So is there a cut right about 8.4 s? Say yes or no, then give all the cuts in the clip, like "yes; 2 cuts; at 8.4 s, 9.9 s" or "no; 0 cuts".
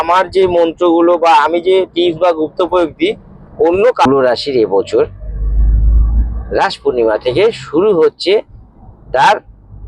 no; 1 cut; at 4.1 s